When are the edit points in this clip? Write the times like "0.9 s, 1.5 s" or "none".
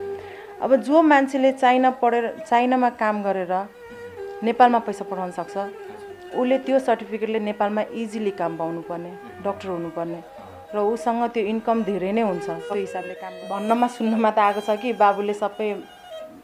13.1 s

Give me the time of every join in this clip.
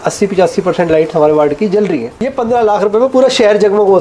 2.2 s

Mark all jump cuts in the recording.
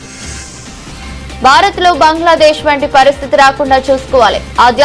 1.2 s

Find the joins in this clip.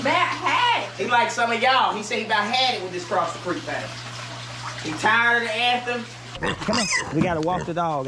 6.3 s

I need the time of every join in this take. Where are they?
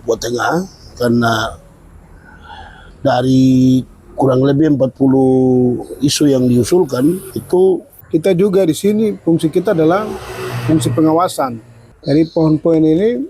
7.3 s, 7.9 s, 11.9 s

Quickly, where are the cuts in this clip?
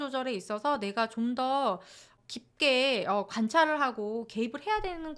2.2 s

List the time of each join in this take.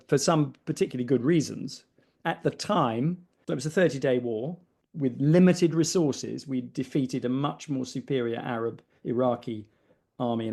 3.4 s

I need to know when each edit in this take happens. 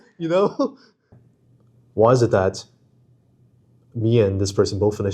1.2 s

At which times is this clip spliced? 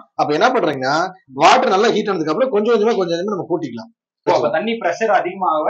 4.3 s

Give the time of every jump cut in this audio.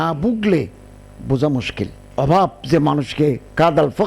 2.0 s

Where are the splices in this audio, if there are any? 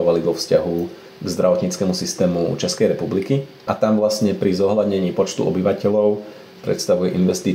3.5 s

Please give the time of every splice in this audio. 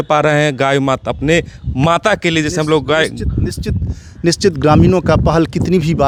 none

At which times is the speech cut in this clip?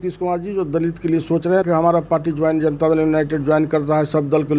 1.7 s

